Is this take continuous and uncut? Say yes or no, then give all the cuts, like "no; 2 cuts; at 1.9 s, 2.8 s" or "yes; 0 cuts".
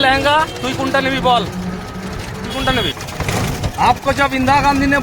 no; 1 cut; at 3.0 s